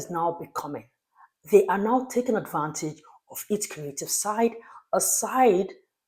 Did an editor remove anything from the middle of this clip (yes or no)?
no